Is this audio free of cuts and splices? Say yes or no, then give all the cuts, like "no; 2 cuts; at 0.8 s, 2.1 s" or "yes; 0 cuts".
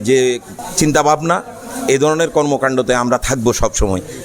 yes; 0 cuts